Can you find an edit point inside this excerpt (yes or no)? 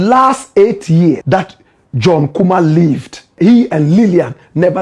yes